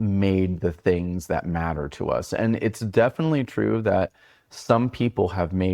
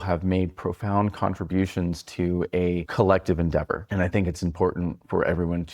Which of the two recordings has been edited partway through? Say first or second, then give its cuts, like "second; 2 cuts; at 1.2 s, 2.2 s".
second; 2 cuts; at 2.9 s, 3.8 s